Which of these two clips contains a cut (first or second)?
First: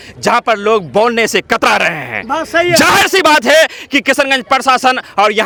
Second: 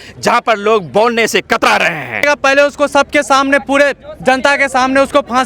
second